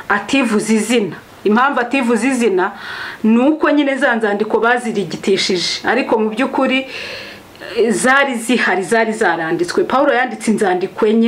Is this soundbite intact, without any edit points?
yes; 0 cuts

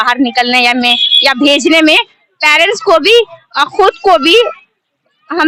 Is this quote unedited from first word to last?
yes; 0 cuts

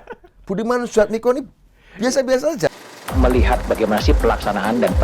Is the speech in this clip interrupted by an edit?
yes; 1 cut; at 2.7 s

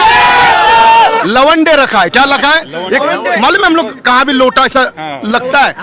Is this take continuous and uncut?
yes; 0 cuts

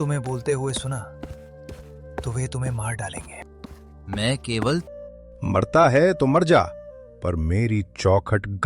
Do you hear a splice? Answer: yes; 1 cut; at 4.9 s

